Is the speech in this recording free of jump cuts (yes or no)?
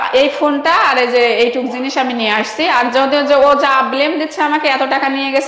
yes